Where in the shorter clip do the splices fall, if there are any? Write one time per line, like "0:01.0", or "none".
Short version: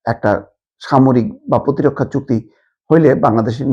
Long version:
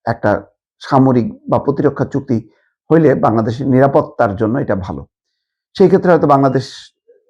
none